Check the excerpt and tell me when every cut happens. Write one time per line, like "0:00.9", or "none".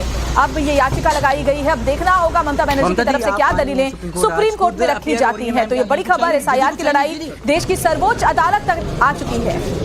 0:03.3